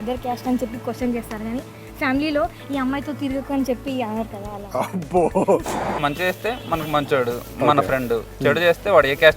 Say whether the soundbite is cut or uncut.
cut